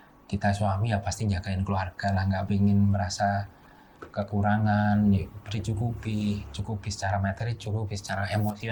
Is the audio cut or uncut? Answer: uncut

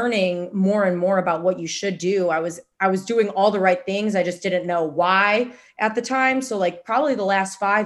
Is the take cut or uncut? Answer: uncut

